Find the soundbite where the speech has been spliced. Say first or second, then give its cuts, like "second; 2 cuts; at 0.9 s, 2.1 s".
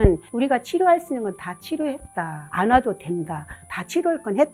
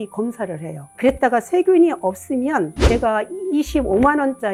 first; 1 cut; at 3.6 s